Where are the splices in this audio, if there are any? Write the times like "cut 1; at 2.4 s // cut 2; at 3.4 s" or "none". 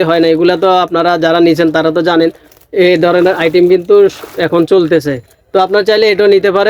none